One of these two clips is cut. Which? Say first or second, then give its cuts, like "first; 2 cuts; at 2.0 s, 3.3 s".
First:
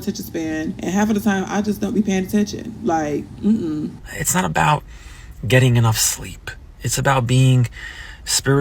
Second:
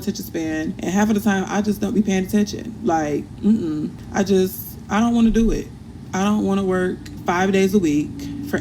first; 1 cut; at 4.0 s